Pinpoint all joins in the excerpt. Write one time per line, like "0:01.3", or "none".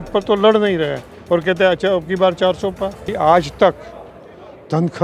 0:03.1

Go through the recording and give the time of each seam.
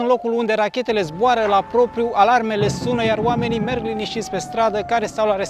none

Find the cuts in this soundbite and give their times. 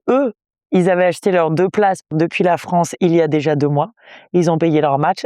0:02.1

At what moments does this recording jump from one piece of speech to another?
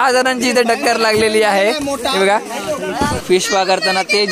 0:03.1

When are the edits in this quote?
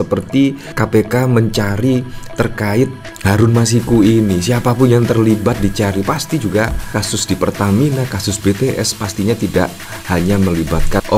none

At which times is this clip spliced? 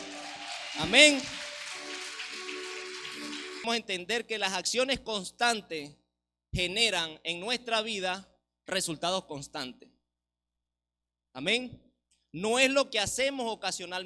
0:03.6

